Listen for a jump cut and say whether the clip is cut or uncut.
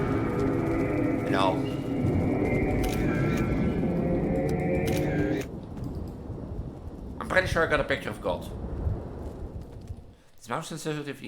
cut